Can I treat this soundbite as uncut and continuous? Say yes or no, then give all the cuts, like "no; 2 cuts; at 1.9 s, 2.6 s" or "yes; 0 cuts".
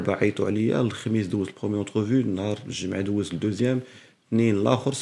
yes; 0 cuts